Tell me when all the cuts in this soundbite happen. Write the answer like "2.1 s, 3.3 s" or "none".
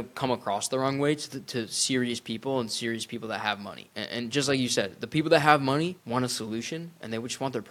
3.9 s, 6.0 s